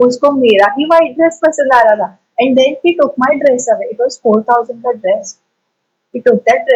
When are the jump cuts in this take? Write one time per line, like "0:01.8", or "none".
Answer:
none